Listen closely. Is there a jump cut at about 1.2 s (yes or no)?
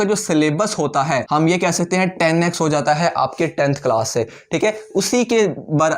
yes